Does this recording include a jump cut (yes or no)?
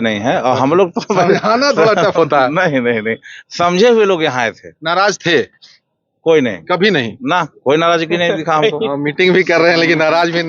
no